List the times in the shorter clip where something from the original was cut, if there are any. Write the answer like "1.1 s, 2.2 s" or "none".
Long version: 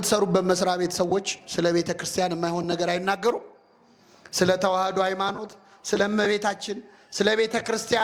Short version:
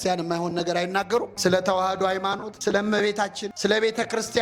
1.3 s, 2.5 s, 3.4 s